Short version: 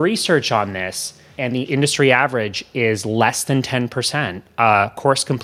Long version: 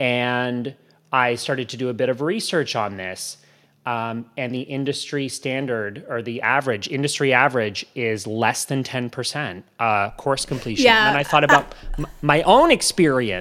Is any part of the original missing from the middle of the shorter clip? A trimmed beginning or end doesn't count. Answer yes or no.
yes